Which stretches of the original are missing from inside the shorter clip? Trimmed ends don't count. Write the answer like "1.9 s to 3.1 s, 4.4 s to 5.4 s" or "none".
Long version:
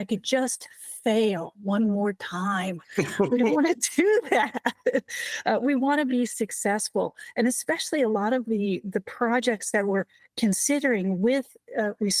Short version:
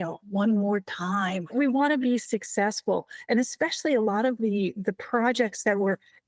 2.9 s to 5.6 s